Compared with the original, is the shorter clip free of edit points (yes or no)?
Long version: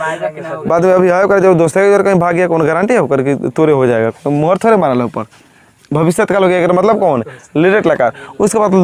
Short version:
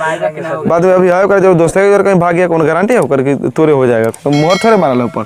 yes